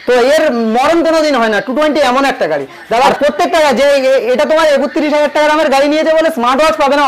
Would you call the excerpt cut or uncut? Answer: cut